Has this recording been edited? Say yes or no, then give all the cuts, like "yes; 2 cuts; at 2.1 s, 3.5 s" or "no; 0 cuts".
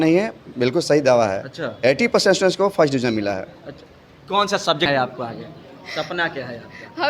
yes; 1 cut; at 4.9 s